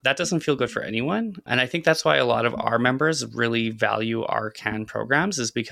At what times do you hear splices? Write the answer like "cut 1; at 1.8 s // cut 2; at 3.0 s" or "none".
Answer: cut 1; at 1.4 s